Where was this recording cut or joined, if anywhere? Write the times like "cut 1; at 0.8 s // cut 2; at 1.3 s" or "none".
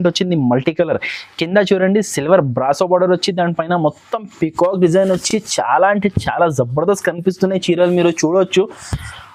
none